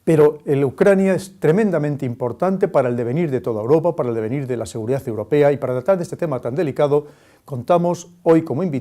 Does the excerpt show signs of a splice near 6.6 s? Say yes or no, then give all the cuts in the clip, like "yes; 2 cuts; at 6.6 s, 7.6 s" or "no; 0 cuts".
no; 1 cut; at 2.1 s